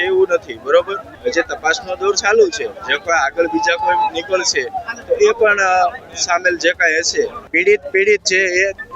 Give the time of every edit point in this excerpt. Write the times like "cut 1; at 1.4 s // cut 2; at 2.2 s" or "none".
cut 1; at 1.0 s // cut 2; at 7.4 s